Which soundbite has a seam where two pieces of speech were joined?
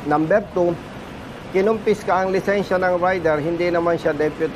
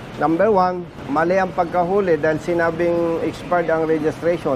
second; 1 cut; at 0.9 s

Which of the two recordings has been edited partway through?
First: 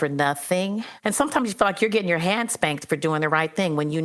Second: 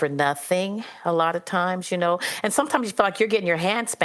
first; 1 cut; at 0.9 s

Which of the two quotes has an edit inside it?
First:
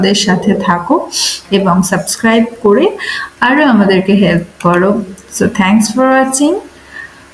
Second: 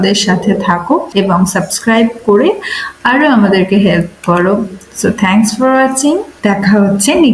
second; 2 cuts; at 1.1 s, 6.3 s

